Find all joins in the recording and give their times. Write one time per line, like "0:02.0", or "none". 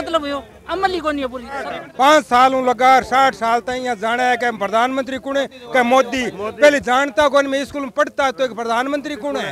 0:01.8